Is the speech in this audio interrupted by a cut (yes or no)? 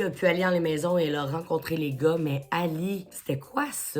yes